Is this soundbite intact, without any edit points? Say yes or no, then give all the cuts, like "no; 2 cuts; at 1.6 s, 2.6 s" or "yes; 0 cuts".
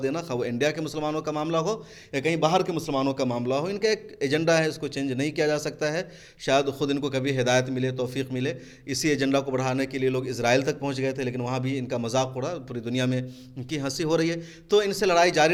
yes; 0 cuts